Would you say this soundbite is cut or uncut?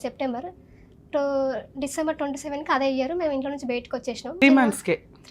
cut